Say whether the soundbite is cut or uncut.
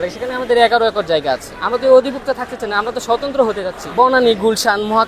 cut